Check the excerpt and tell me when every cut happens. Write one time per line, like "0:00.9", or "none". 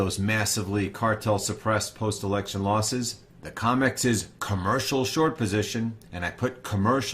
0:01.8